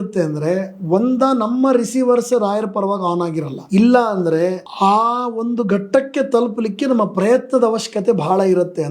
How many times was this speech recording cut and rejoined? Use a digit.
2